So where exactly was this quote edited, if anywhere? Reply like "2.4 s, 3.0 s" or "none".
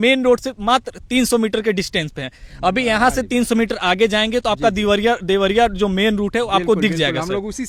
none